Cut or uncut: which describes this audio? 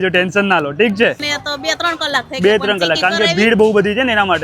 cut